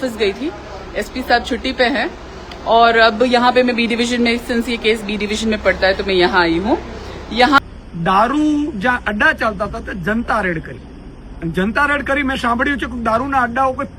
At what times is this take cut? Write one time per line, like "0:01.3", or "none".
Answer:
0:07.6

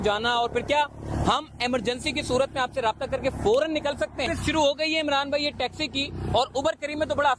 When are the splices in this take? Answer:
0:04.3

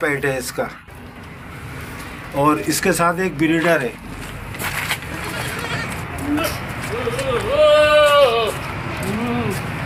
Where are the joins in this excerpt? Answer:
none

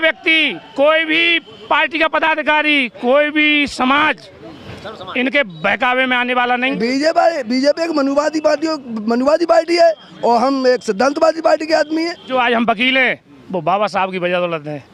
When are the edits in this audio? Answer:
0:06.7
0:12.3

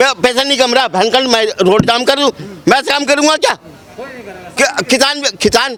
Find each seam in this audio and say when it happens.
none

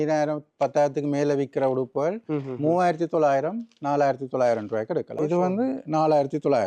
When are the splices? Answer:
0:05.2

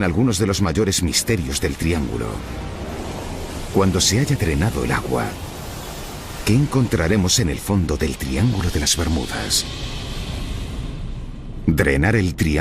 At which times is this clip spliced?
0:11.0

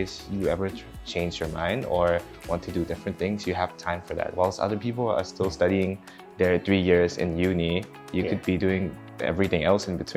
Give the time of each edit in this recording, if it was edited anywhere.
none

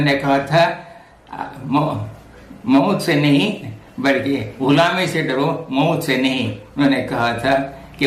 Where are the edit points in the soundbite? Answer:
none

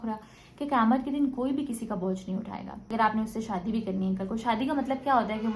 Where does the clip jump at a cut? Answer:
0:02.9

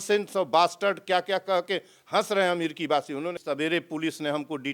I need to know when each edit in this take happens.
0:03.4

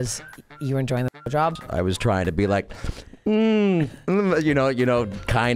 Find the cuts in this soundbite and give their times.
0:01.6

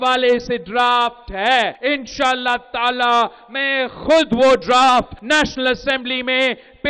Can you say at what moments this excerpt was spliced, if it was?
0:01.8
0:05.2

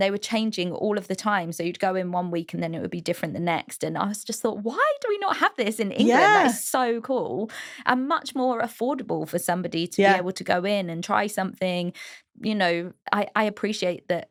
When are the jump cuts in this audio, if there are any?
none

